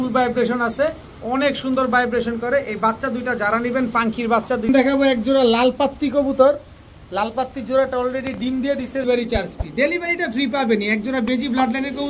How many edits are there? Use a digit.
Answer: 2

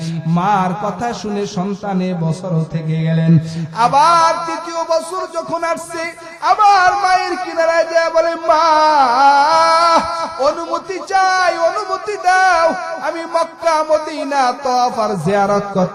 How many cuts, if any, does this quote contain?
0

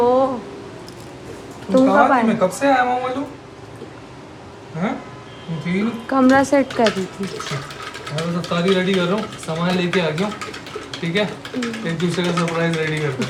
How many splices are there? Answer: 0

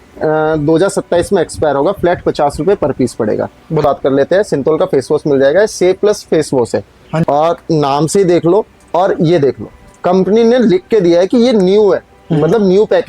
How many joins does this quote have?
2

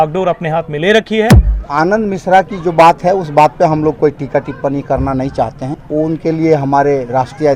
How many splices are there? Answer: 2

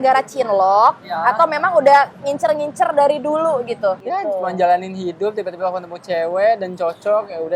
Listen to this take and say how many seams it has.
1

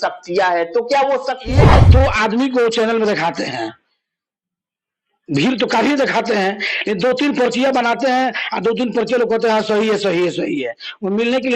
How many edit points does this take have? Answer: 1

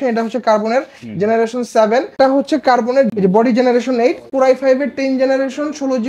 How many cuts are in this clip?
3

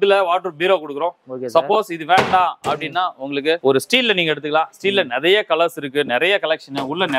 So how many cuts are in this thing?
0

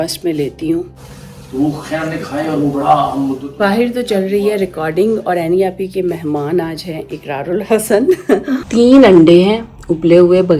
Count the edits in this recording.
3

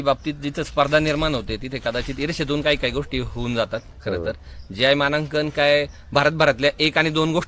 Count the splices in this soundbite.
0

